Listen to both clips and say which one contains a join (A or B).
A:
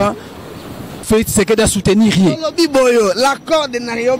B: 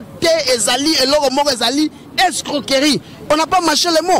A